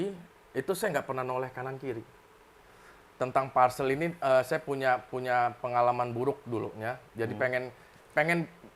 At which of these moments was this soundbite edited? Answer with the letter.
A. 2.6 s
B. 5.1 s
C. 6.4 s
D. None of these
A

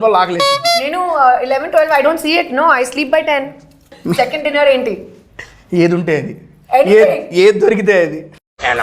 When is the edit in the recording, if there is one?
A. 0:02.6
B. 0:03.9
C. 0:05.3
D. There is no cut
B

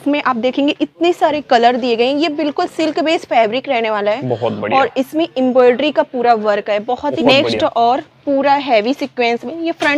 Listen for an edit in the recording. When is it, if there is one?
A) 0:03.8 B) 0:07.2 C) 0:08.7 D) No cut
B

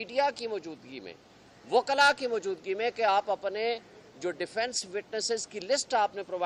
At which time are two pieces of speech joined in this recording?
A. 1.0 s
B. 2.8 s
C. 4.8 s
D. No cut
D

